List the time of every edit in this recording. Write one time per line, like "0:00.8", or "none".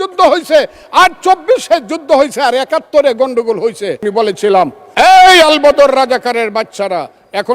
0:04.3